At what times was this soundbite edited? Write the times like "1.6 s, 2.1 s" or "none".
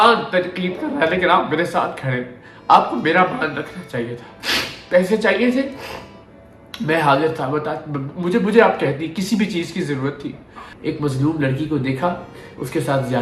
10.7 s